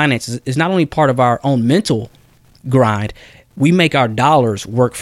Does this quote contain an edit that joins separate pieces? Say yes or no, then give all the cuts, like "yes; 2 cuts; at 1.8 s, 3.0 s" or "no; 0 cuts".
no; 0 cuts